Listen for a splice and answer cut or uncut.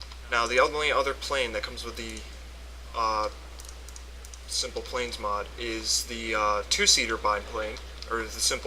cut